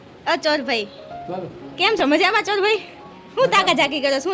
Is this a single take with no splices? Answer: yes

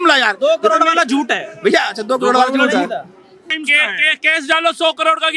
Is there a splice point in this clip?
yes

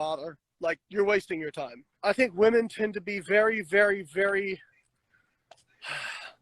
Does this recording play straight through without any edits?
no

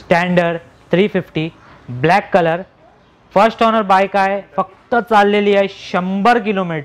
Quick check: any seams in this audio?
no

